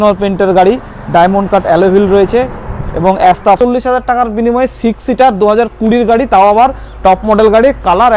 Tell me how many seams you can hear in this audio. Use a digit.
1